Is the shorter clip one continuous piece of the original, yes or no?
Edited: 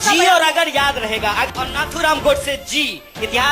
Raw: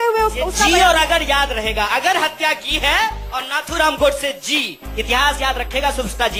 no